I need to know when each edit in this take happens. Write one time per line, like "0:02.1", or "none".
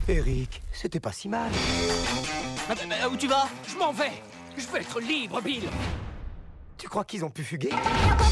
none